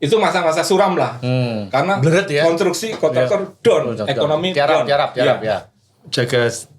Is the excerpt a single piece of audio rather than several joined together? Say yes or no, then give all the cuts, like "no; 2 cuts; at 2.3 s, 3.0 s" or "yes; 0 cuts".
no; 1 cut; at 5.8 s